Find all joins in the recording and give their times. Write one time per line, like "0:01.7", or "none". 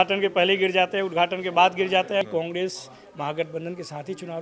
0:02.2